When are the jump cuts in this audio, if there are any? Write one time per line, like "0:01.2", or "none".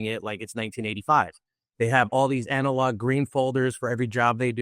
0:01.6